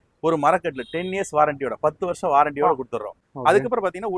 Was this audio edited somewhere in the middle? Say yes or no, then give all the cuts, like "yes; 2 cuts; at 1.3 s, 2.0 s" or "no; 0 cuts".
yes; 1 cut; at 3.3 s